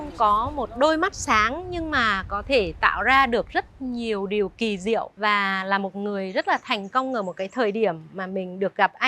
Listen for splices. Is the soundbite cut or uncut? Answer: uncut